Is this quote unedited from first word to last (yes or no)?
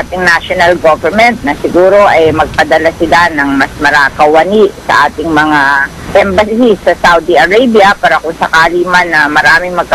no